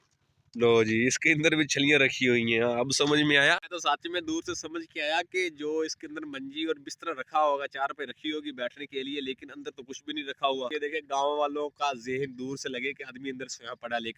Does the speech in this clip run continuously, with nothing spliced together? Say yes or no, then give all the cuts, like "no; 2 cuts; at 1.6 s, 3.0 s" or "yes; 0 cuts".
no; 2 cuts; at 3.7 s, 10.7 s